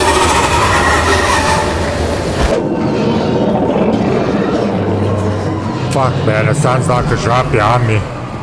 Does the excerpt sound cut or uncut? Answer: cut